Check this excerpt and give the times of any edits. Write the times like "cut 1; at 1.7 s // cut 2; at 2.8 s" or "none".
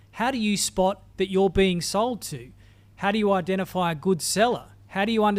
none

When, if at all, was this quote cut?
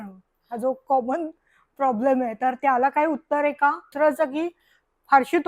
cut 1; at 3.9 s

